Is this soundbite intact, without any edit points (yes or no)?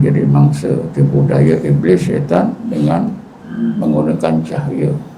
yes